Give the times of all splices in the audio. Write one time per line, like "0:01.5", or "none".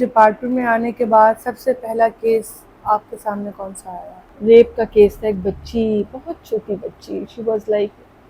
0:04.2